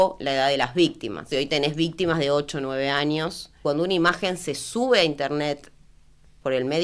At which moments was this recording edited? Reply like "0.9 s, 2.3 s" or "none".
1.3 s, 3.5 s